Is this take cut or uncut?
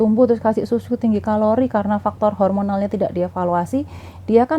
uncut